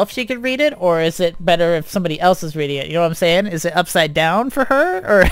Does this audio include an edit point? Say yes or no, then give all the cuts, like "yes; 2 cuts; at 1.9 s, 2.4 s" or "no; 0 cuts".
no; 0 cuts